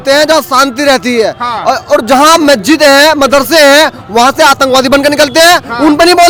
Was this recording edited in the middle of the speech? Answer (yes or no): no